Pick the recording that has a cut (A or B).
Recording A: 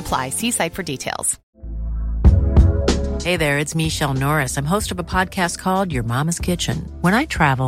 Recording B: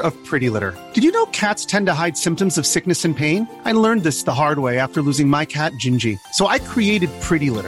A